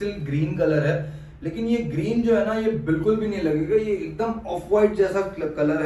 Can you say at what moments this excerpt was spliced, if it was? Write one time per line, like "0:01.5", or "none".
none

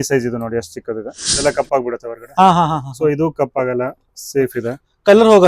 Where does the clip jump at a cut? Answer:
0:01.3

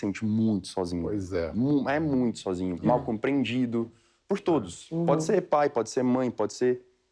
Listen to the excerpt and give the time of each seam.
none

